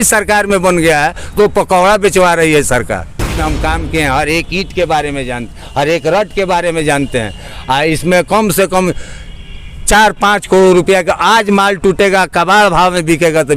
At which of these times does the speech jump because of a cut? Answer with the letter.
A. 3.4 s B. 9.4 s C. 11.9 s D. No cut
A